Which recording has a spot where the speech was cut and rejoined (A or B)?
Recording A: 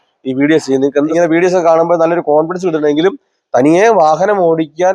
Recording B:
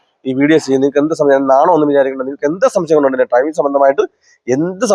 A